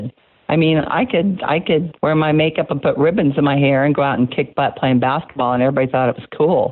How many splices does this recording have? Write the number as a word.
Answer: one